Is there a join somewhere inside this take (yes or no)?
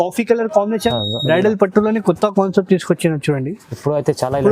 yes